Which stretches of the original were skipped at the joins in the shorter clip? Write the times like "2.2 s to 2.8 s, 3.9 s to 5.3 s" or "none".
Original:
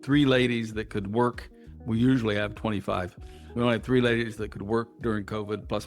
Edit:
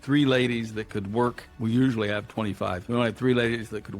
1.5 s to 1.7 s, 3.1 s to 3.5 s